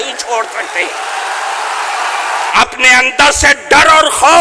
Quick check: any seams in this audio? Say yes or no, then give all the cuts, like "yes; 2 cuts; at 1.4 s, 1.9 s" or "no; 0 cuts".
yes; 1 cut; at 2.5 s